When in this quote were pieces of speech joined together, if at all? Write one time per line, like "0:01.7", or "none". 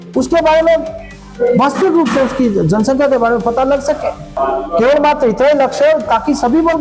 0:04.2

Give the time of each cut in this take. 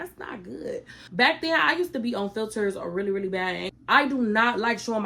0:01.0
0:03.7

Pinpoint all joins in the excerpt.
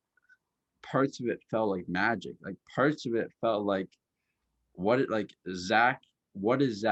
none

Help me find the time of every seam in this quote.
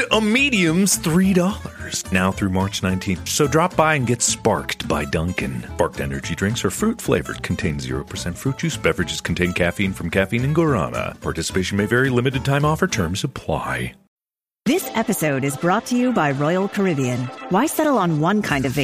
0:14.1

